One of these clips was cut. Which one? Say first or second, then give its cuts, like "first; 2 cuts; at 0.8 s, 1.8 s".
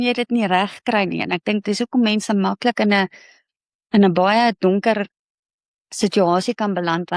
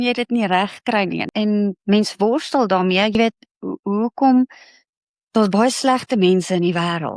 second; 2 cuts; at 1.3 s, 3.1 s